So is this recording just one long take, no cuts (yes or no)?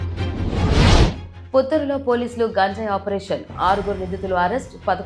no